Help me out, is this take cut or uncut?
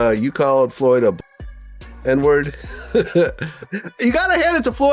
cut